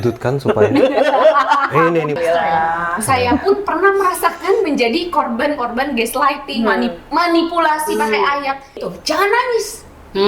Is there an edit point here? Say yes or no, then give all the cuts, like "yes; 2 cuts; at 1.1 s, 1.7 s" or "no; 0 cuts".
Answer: yes; 2 cuts; at 2.2 s, 8.9 s